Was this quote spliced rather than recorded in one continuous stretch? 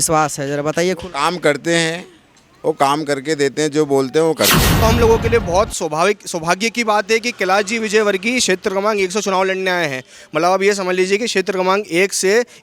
yes; 1 cut; at 4.8 s

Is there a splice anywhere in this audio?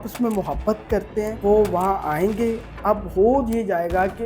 yes; 1 cut; at 1.3 s

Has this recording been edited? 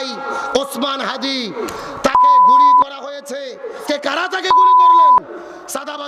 yes; 1 cut; at 3.8 s

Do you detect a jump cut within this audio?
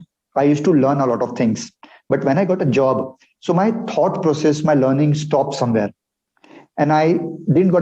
no; 0 cuts

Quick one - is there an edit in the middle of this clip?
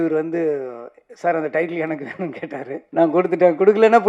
yes; 1 cut; at 2.8 s

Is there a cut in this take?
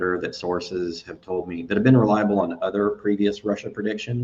no; 0 cuts

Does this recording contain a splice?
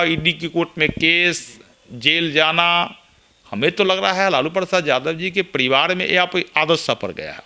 no; 0 cuts

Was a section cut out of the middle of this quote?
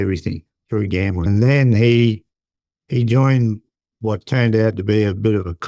yes; 1 cut; at 1.2 s

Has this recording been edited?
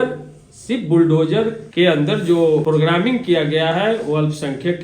yes; 2 cuts; at 1.6 s, 2.6 s

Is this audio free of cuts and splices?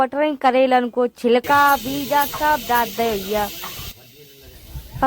yes; 0 cuts

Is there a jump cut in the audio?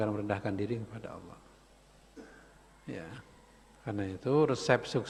no; 0 cuts

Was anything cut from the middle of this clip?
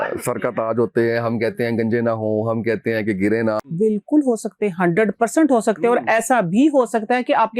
yes; 1 cut; at 3.6 s

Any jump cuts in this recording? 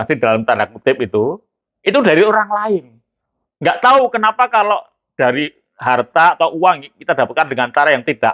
no; 0 cuts

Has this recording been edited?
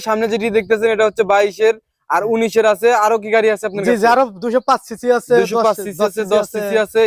no; 0 cuts

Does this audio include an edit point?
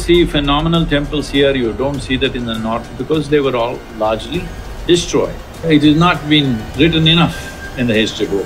yes; 2 cuts; at 5.7 s, 6.7 s

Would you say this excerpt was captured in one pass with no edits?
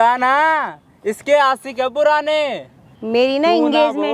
no; 1 cut; at 2.9 s

